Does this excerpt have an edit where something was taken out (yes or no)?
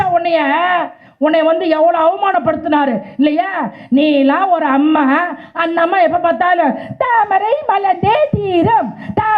no